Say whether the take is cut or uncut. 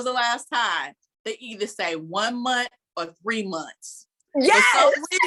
uncut